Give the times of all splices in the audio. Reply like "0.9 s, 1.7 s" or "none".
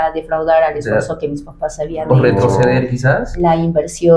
none

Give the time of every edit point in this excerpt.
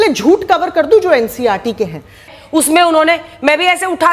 2.4 s

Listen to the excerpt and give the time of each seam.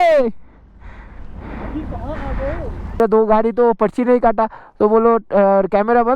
3.0 s

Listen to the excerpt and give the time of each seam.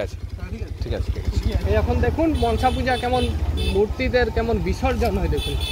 1.6 s

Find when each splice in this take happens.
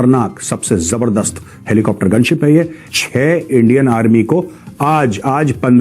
2.9 s

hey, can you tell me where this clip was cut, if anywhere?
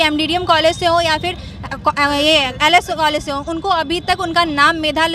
none

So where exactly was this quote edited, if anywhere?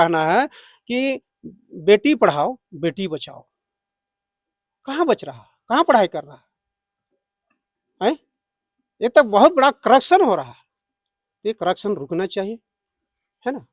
none

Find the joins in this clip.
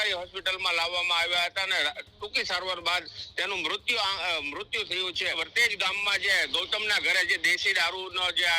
5.4 s

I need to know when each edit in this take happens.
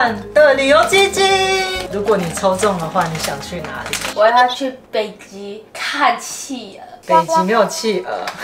1.8 s, 4.0 s

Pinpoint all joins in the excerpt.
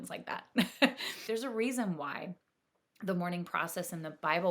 1.2 s

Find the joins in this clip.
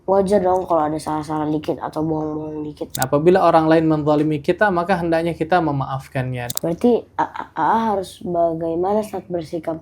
3.0 s, 6.4 s

